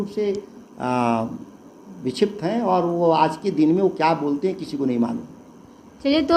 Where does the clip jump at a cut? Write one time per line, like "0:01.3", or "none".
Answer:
none

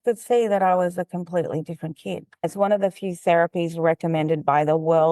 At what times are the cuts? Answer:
0:02.4

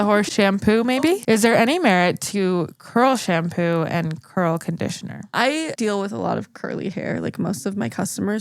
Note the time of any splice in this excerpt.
0:01.2
0:05.6

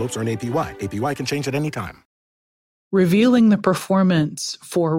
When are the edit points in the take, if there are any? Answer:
0:02.3

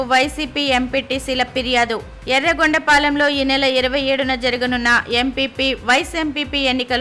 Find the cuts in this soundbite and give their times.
none

